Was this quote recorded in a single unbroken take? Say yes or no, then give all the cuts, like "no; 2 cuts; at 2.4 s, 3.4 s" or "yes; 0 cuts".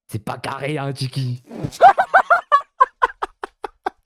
yes; 0 cuts